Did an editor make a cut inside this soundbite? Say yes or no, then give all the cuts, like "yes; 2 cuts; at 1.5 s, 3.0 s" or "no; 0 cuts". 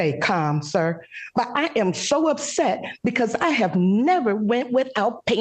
no; 0 cuts